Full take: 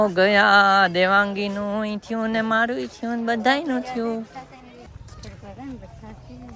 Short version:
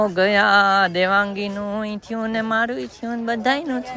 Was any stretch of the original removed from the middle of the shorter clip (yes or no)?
no